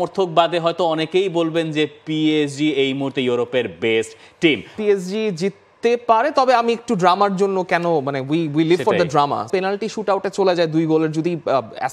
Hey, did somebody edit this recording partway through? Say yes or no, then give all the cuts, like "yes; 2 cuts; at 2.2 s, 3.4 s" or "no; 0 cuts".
yes; 2 cuts; at 4.8 s, 9.5 s